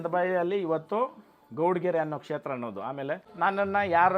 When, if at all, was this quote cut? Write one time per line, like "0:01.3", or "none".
0:03.3